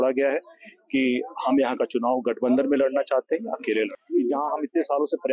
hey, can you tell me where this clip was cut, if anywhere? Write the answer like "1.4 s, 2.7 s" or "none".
4.0 s